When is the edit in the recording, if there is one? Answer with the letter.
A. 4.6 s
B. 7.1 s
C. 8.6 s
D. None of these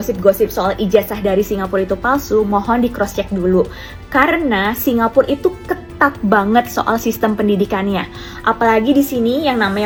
D